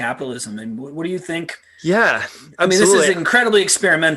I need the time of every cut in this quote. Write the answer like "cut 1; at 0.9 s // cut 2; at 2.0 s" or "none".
cut 1; at 1.6 s